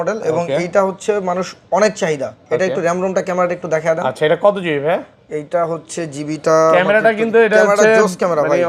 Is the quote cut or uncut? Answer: uncut